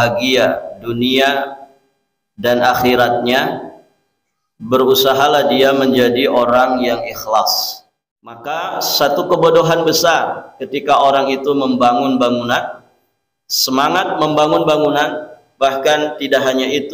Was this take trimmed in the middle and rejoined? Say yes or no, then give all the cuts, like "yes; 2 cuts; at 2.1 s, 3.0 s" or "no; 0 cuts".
yes; 1 cut; at 8.5 s